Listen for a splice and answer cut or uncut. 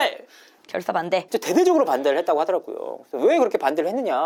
uncut